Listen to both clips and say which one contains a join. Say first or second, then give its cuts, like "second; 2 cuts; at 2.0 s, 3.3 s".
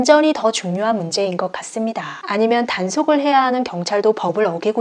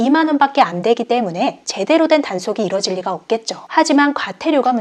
first; 1 cut; at 2.2 s